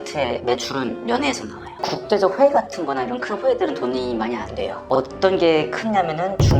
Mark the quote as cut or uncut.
cut